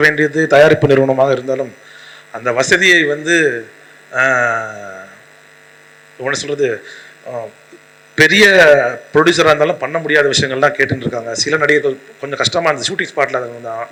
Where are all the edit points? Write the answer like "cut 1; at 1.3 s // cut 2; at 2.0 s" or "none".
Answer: none